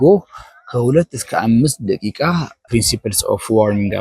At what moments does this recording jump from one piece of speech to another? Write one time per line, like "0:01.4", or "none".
0:02.6